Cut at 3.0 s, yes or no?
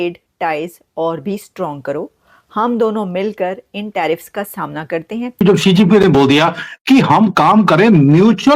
no